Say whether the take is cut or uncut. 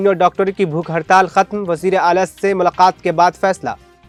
uncut